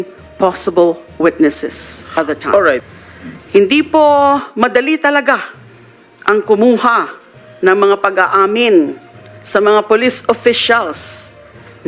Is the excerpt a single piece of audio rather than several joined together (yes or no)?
no